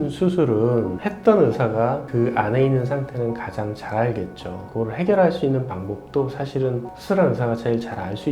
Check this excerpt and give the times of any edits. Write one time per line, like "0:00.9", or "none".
0:00.9
0:04.6